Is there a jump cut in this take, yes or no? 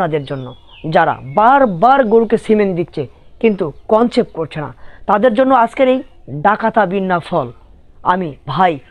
no